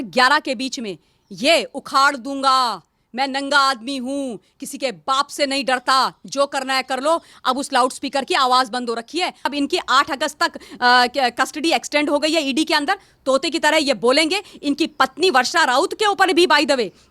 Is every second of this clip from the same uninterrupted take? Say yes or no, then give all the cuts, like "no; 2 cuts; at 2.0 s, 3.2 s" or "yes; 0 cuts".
no; 1 cut; at 9.5 s